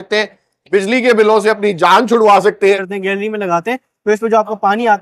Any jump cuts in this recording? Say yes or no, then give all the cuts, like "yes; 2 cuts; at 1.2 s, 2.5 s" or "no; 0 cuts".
yes; 1 cut; at 2.9 s